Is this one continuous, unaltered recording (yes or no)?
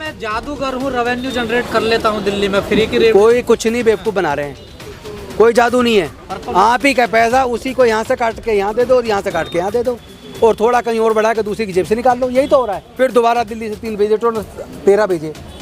no